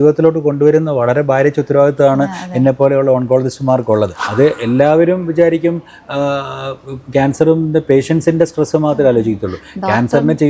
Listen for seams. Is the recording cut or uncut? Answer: cut